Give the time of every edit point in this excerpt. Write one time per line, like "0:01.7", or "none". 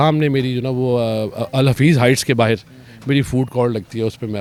none